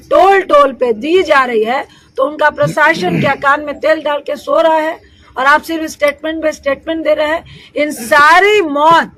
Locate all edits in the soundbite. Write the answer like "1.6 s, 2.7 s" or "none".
none